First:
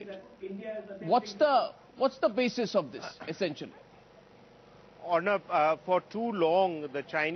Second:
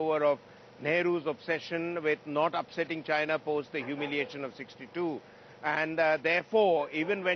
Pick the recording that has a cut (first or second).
first